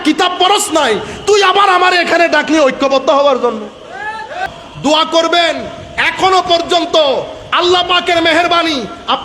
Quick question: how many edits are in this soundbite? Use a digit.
1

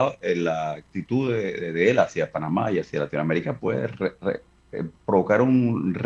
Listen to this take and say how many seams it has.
1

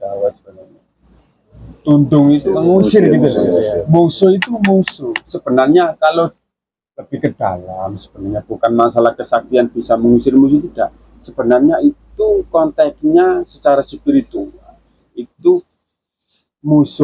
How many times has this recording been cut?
1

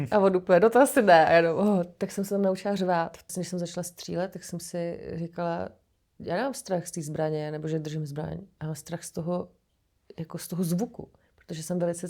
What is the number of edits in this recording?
1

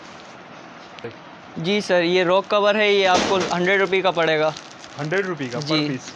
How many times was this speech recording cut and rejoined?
1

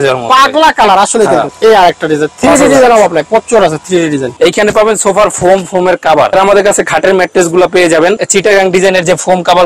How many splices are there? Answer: 4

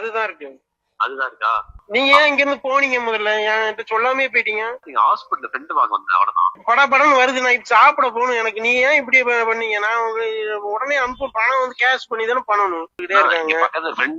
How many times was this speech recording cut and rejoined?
4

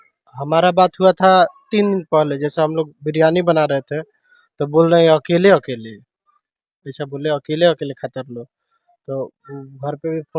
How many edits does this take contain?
0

